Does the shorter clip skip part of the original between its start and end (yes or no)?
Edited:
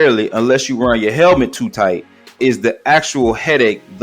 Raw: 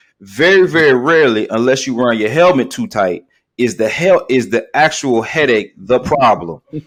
yes